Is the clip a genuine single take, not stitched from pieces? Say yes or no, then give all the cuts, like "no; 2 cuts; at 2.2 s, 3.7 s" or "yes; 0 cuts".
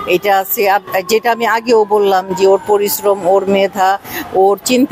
yes; 0 cuts